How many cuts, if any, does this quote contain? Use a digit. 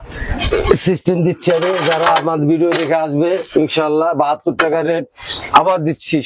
0